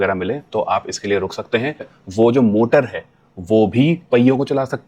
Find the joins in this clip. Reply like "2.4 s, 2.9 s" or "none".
2.0 s